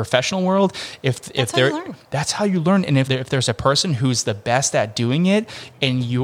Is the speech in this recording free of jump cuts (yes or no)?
no